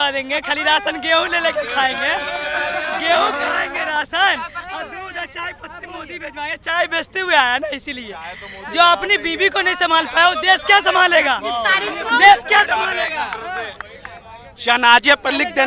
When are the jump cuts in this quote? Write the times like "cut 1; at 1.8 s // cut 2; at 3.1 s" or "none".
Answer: none